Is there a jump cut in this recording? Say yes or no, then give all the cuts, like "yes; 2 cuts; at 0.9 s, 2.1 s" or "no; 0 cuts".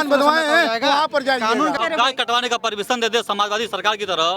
yes; 1 cut; at 1.8 s